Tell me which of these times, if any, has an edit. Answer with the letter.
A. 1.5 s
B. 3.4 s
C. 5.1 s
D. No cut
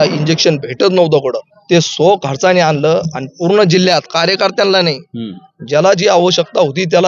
A